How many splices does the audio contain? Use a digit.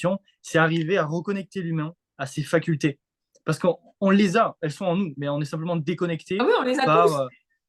0